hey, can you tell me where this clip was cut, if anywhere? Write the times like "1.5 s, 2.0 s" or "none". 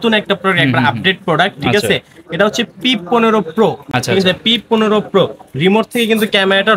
none

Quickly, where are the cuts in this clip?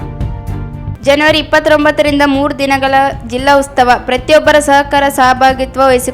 0.9 s

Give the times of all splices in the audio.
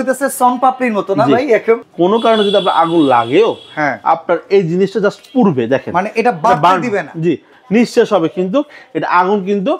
1.9 s, 7.5 s

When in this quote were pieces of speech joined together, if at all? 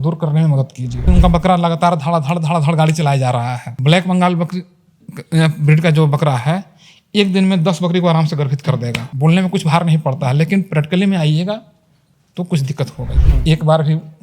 1.1 s, 3.6 s, 9.0 s, 13.2 s

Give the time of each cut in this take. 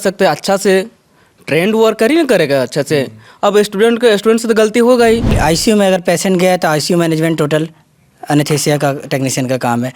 5.3 s

